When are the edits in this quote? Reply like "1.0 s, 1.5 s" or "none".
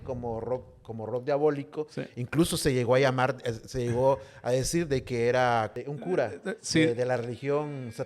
5.8 s